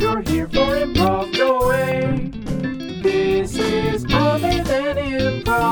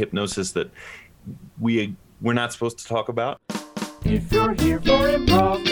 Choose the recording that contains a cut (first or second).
second